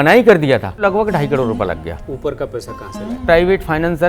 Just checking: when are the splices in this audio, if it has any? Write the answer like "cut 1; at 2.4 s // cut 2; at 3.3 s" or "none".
cut 1; at 0.8 s // cut 2; at 2.0 s // cut 3; at 3.2 s